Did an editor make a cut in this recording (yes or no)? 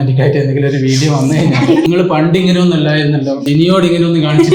yes